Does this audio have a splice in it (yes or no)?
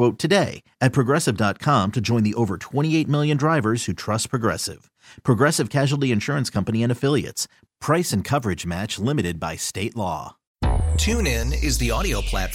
yes